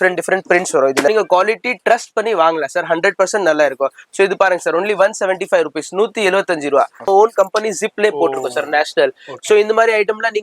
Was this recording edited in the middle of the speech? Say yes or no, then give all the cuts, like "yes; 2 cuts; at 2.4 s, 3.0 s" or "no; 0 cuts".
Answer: yes; 2 cuts; at 1.1 s, 7.0 s